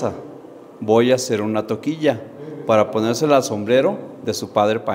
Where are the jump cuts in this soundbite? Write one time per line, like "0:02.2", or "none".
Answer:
none